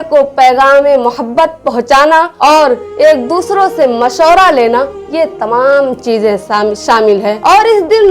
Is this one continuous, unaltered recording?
yes; 0 cuts

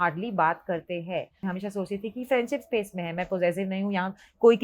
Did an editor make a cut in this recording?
yes; 1 cut; at 1.5 s

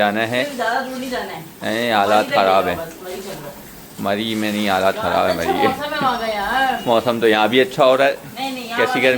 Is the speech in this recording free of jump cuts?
yes; 0 cuts

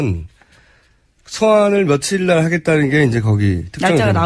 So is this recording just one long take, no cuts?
no; 1 cut; at 3.4 s

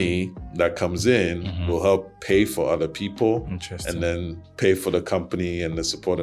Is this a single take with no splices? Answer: yes; 0 cuts

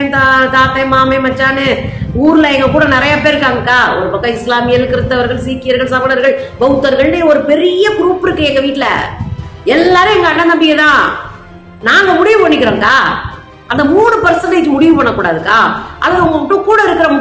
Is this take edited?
no; 0 cuts

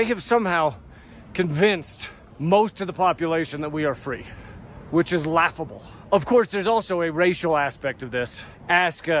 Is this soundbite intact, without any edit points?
yes; 0 cuts

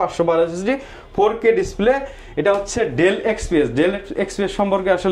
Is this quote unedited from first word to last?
yes; 0 cuts

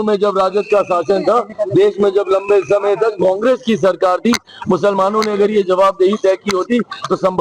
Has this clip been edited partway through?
no; 0 cuts

